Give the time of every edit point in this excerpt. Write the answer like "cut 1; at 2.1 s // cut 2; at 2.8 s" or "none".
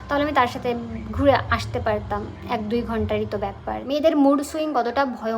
cut 1; at 3.8 s